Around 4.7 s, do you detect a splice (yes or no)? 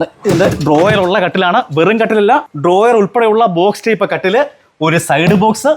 no